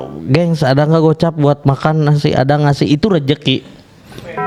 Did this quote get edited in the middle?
no; 0 cuts

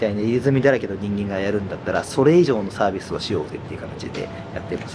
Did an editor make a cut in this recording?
no; 0 cuts

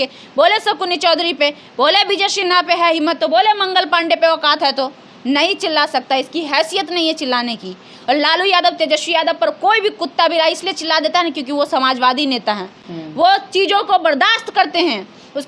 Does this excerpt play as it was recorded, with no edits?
yes; 0 cuts

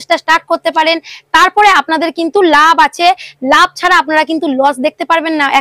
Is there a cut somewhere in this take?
no; 0 cuts

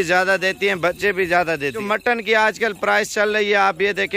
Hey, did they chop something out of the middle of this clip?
yes; 1 cut; at 1.8 s

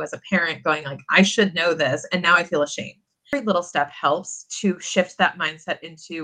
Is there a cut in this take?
yes; 1 cut; at 3.3 s

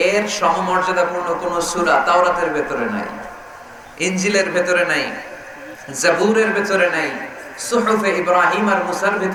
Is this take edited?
no; 0 cuts

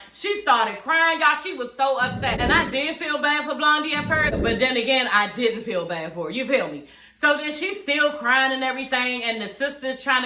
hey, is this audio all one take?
yes; 0 cuts

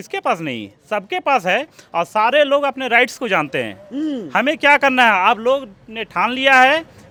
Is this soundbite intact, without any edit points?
yes; 0 cuts

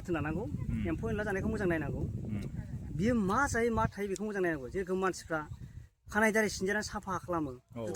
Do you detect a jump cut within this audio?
no; 0 cuts

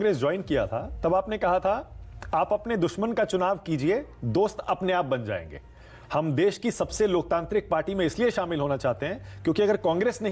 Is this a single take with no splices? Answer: yes; 0 cuts

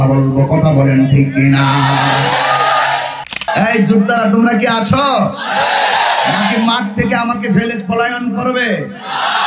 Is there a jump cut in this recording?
yes; 1 cut; at 3.5 s

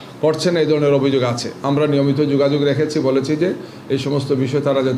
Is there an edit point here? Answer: no; 0 cuts

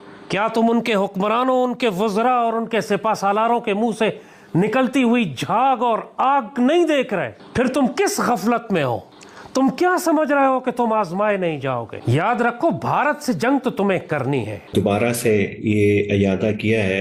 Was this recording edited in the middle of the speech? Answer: no; 0 cuts

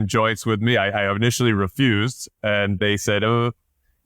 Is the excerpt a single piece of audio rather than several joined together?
no; 1 cut; at 2.8 s

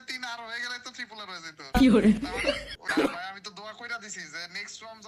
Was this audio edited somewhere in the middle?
yes; 1 cut; at 3.1 s

